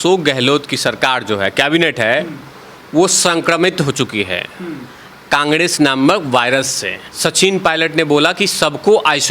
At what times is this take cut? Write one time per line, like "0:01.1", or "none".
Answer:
0:07.1